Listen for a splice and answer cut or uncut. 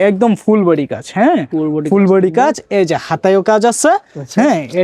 uncut